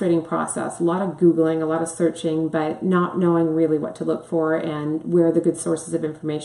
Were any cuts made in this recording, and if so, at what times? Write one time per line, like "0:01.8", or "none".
none

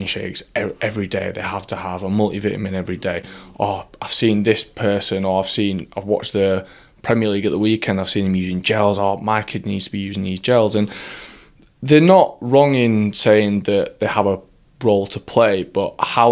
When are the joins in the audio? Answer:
none

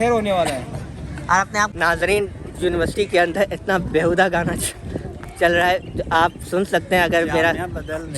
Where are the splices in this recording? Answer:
0:01.7

